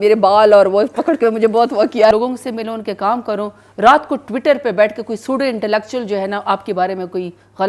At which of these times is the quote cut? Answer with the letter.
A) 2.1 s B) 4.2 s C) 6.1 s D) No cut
A